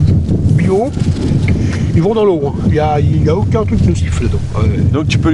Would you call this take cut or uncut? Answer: uncut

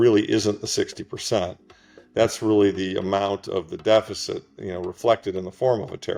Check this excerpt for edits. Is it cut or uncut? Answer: uncut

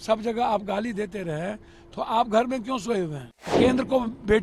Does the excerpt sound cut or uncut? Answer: cut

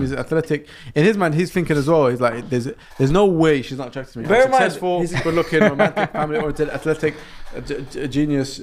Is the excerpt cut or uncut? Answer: uncut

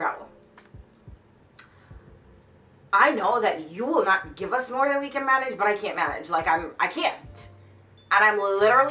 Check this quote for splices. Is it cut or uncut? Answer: uncut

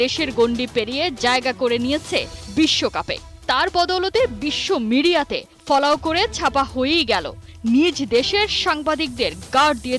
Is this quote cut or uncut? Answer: uncut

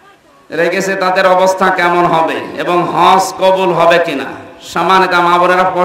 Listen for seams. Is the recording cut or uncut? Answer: uncut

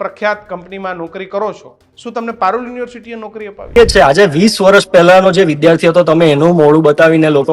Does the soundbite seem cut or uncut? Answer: cut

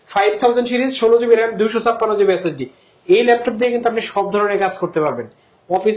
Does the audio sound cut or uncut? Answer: uncut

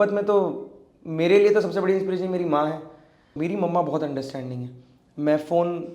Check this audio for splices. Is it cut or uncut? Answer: cut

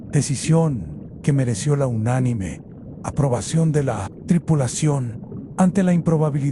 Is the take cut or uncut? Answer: cut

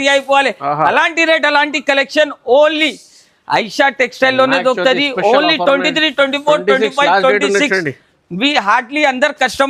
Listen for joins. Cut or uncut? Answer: uncut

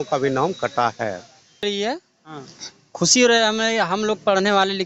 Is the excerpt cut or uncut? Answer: cut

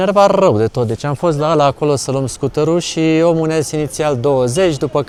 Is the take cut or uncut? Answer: uncut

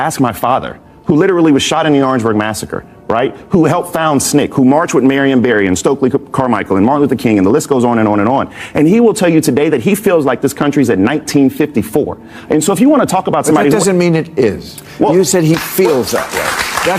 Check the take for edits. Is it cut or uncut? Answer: uncut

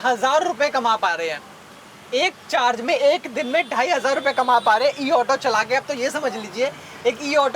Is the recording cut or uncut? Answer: uncut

